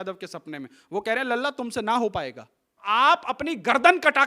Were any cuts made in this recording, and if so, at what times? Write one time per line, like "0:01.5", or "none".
0:02.8